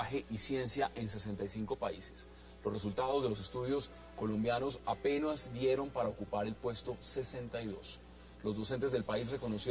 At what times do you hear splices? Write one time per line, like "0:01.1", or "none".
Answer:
0:02.4